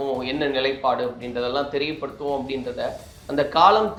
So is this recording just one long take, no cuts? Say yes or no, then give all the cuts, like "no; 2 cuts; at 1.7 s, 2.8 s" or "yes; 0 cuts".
yes; 0 cuts